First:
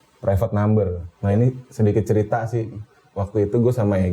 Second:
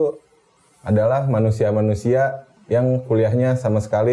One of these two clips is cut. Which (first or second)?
first